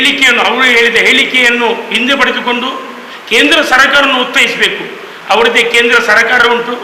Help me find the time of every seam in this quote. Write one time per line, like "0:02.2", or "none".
none